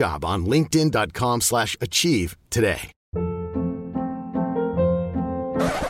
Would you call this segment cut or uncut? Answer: cut